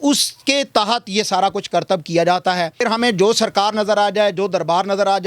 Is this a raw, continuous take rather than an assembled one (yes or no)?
no